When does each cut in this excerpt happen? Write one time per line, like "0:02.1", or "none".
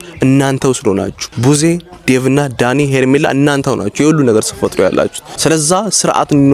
0:01.2
0:05.2